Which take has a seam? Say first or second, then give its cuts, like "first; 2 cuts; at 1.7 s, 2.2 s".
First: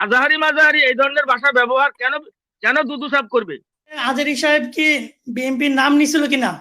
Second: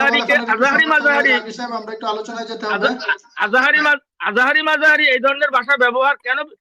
first; 1 cut; at 4.0 s